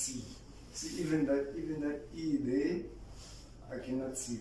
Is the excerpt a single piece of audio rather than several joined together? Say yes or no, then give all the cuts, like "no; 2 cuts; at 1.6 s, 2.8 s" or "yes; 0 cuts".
yes; 0 cuts